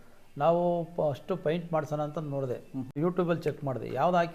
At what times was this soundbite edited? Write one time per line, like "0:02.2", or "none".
0:02.9

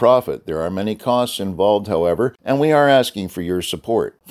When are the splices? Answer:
0:02.4

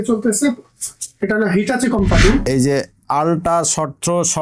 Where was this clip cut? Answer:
0:02.4

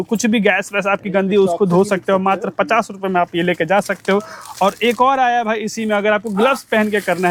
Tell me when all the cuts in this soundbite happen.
none

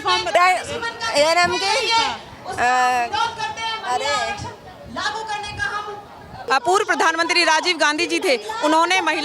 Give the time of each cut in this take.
0:06.4

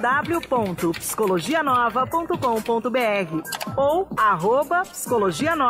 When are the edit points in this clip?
0:04.2

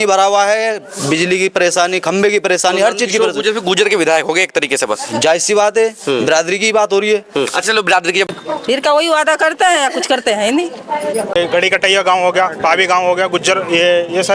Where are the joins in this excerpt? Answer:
0:08.3
0:11.4

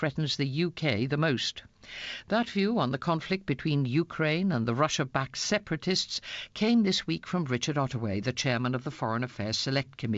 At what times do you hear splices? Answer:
0:04.2

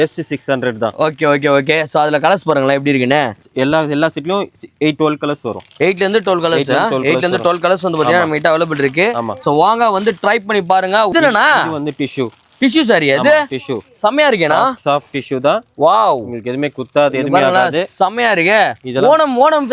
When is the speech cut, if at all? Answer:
0:03.4
0:11.1

